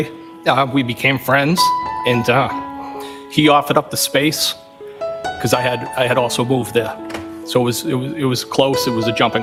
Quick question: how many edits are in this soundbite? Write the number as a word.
zero